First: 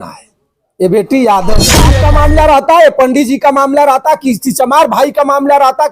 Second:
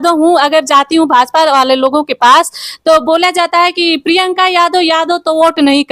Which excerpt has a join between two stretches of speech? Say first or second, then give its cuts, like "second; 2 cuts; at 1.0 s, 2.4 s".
first; 1 cut; at 1.9 s